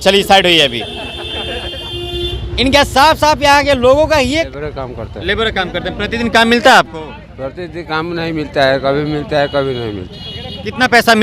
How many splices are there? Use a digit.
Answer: 1